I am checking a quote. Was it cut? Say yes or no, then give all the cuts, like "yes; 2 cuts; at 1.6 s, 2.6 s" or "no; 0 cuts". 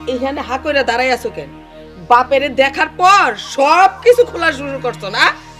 no; 0 cuts